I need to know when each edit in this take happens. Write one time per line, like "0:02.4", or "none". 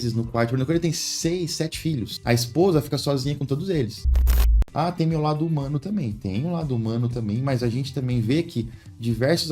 0:04.4